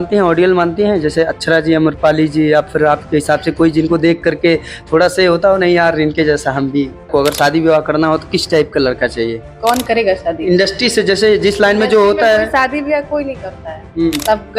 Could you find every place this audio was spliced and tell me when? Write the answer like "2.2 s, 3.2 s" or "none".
7.1 s, 9.5 s